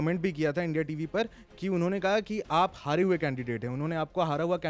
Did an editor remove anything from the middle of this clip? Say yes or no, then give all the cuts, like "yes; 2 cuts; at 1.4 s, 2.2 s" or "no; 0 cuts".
no; 0 cuts